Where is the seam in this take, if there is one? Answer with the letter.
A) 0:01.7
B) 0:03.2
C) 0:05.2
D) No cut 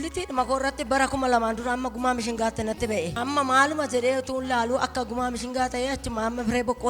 B